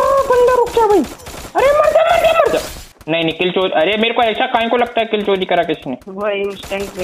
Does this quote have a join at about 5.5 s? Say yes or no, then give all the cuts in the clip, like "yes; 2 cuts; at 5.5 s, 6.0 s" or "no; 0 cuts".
no; 1 cut; at 2.8 s